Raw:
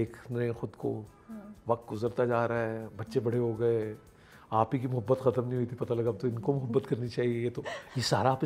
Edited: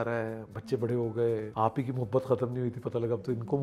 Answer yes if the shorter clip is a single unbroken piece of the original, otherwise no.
no